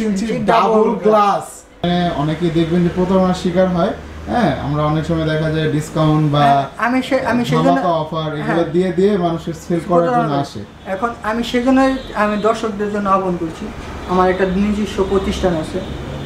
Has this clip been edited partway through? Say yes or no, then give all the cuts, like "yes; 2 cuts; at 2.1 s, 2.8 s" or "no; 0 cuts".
yes; 1 cut; at 1.8 s